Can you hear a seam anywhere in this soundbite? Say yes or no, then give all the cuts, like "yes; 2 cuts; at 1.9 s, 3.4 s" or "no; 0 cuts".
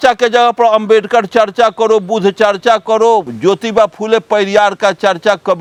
no; 0 cuts